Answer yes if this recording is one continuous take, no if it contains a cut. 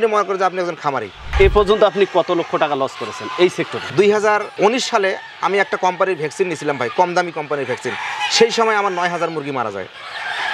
no